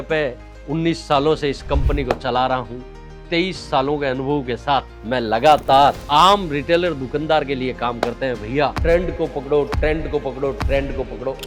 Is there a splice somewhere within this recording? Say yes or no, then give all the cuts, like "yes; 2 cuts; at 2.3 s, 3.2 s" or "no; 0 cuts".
no; 0 cuts